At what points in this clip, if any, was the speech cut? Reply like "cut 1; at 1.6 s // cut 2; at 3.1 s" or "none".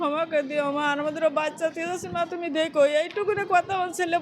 none

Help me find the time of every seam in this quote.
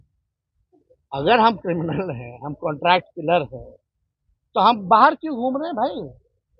none

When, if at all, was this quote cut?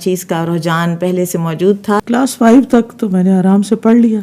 cut 1; at 2.0 s

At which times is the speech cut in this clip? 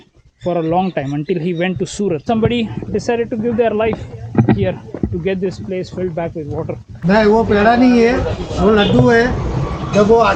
cut 1; at 2.2 s // cut 2; at 6.9 s

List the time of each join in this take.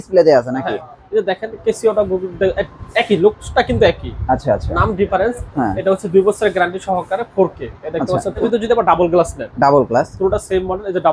cut 1; at 8.4 s

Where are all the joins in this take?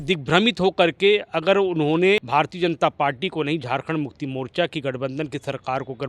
cut 1; at 2.2 s

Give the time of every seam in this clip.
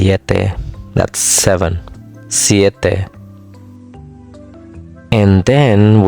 cut 1; at 3.1 s // cut 2; at 4.8 s

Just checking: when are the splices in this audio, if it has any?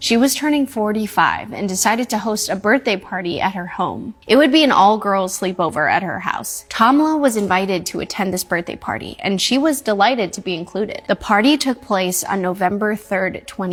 none

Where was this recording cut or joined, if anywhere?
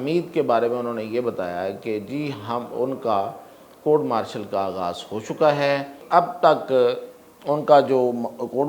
cut 1; at 5.9 s

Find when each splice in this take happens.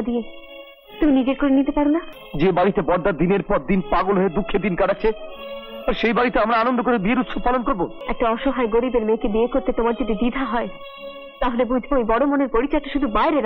cut 1; at 2.2 s // cut 2; at 8.0 s

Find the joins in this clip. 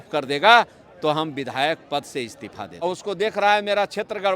cut 1; at 2.8 s

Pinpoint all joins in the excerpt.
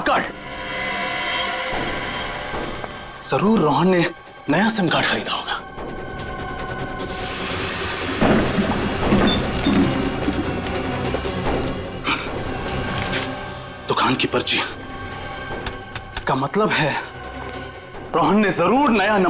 none

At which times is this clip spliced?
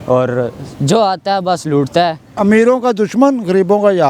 cut 1; at 2.3 s

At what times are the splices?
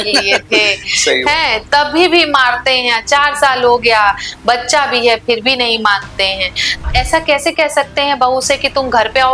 cut 1; at 6.8 s

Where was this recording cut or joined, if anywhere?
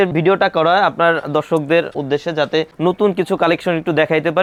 none

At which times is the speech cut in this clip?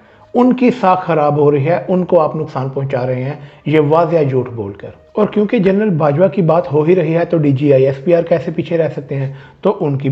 none

